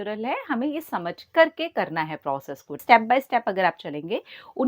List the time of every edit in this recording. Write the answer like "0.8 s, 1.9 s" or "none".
2.8 s